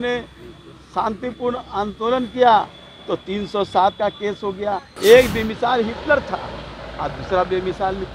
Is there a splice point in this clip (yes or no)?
yes